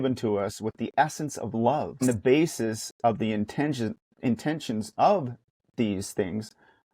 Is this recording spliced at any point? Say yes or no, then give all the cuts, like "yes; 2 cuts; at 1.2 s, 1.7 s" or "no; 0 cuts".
yes; 1 cut; at 2.0 s